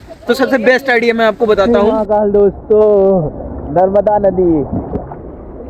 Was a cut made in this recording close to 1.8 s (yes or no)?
yes